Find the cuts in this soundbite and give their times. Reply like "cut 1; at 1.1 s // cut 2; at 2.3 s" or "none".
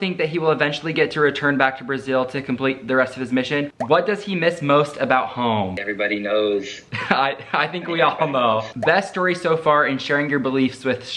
cut 1; at 3.7 s // cut 2; at 8.7 s